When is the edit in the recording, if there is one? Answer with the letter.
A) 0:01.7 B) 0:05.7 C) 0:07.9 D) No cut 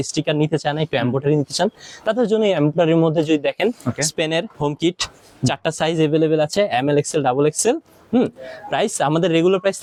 D